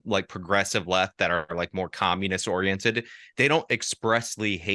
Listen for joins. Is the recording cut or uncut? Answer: uncut